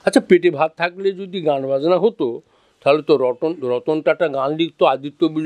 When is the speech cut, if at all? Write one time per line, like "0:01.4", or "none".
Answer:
none